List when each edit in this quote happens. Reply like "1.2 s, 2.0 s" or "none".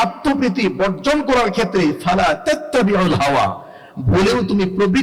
none